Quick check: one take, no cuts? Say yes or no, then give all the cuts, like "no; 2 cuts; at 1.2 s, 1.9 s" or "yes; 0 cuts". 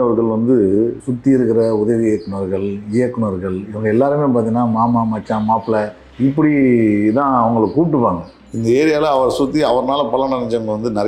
no; 3 cuts; at 1.0 s, 6.0 s, 8.3 s